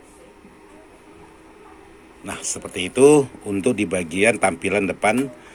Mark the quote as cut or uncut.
uncut